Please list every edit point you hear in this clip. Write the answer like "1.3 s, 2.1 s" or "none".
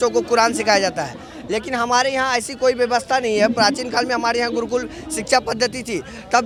none